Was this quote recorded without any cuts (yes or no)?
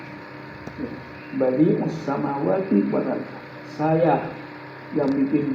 yes